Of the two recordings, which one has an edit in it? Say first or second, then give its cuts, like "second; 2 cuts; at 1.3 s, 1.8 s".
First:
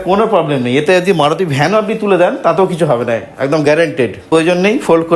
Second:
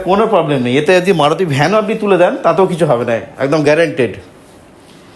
first; 1 cut; at 4.2 s